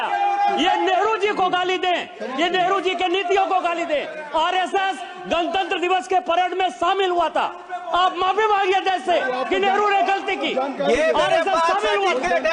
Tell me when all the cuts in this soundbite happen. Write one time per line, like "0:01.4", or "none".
none